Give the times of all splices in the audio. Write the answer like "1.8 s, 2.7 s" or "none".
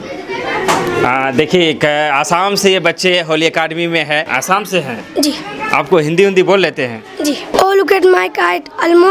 4.3 s, 7.5 s